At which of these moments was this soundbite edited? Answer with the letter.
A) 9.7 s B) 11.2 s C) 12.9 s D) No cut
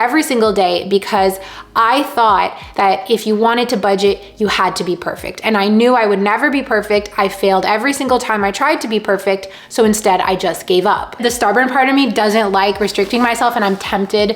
B